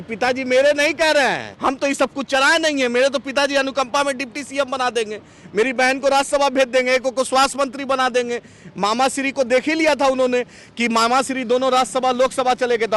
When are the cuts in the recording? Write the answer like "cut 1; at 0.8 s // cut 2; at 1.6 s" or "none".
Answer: cut 1; at 1.5 s